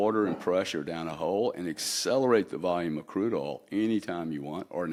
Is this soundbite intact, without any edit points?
yes; 0 cuts

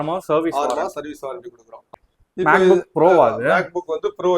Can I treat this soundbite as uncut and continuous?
no; 1 cut; at 2.0 s

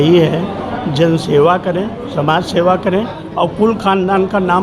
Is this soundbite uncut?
yes; 0 cuts

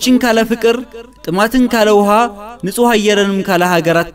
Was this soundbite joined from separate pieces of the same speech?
no; 0 cuts

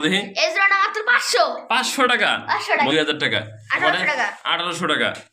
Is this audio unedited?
no; 1 cut; at 2.9 s

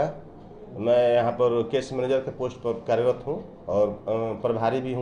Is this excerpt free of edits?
yes; 0 cuts

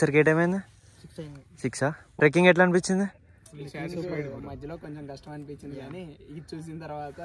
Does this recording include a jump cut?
no; 0 cuts

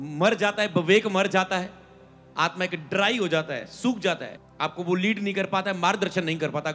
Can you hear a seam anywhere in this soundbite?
yes; 1 cut; at 4.4 s

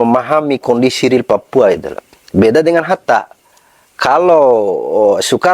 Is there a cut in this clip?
no; 0 cuts

